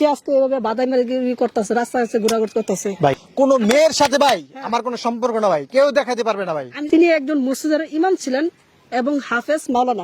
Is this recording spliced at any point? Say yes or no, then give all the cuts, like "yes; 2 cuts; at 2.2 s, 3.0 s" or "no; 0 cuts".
yes; 2 cuts; at 3.2 s, 6.7 s